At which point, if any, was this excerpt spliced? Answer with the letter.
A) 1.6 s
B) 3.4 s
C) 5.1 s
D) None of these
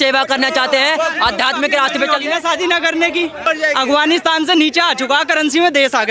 B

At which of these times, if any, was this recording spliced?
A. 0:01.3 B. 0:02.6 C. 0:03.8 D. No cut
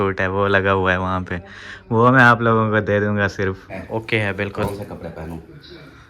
C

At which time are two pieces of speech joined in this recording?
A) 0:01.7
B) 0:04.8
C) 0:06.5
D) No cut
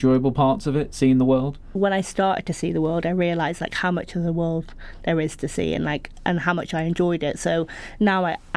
A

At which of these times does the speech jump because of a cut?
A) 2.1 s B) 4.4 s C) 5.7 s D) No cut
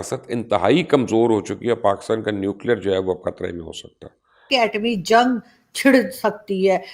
B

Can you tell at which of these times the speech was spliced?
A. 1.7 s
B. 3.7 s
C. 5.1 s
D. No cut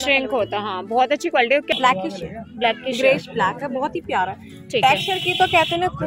A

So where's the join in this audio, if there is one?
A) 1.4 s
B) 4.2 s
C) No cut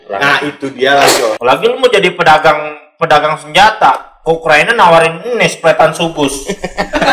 A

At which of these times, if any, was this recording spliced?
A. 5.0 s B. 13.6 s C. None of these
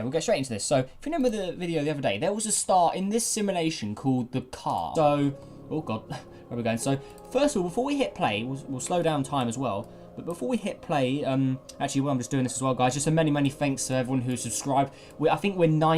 C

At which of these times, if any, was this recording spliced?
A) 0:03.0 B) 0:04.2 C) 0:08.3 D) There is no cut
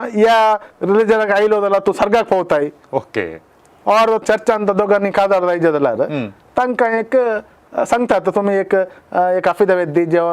B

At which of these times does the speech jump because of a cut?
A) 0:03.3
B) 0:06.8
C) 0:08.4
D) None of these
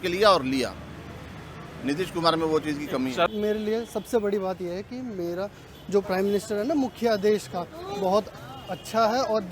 A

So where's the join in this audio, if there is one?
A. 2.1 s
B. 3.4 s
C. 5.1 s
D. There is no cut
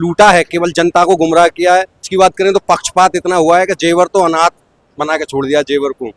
A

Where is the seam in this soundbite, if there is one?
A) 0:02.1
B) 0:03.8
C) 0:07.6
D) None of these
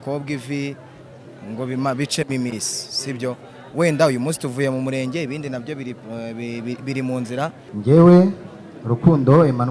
C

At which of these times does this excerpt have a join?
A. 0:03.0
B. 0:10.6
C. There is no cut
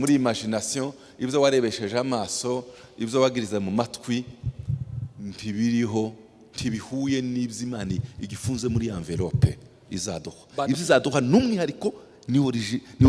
C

